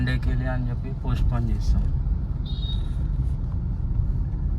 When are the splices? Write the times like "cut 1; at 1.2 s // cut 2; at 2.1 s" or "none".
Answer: none